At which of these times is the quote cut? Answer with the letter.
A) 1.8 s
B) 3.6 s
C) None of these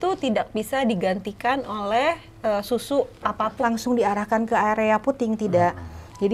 B